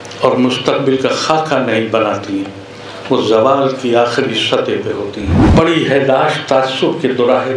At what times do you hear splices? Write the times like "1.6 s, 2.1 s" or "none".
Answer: 5.4 s